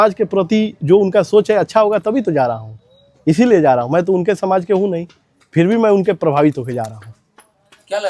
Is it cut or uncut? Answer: uncut